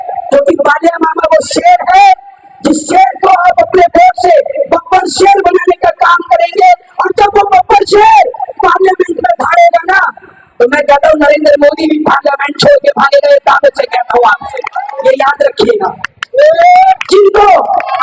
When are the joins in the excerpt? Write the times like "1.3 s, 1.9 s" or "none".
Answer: 15.0 s